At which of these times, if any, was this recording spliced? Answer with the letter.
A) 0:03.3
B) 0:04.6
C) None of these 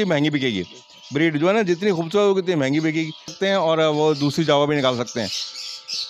A